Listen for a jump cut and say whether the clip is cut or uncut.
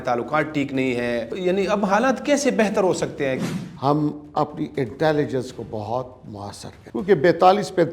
cut